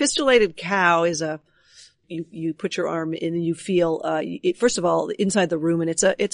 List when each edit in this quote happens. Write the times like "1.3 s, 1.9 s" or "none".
2.0 s